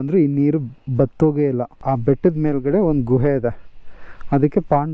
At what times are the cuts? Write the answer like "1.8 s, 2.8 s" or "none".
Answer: 1.8 s

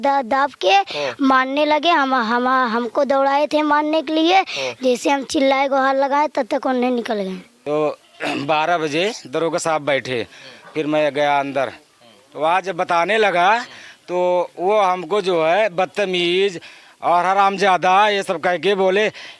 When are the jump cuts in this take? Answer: 7.5 s

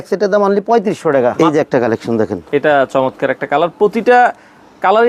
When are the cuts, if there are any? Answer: 1.3 s

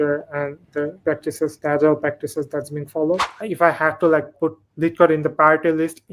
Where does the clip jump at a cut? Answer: 1.2 s, 3.4 s, 4.3 s

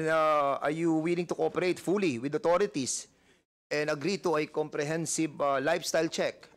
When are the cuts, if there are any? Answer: none

